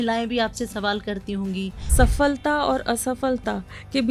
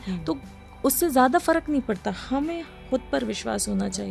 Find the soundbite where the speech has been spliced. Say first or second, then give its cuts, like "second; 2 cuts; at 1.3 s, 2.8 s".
first; 1 cut; at 1.8 s